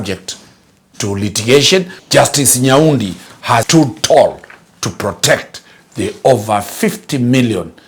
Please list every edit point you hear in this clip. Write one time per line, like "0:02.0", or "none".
0:02.0
0:03.7